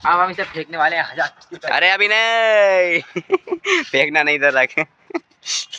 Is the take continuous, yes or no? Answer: yes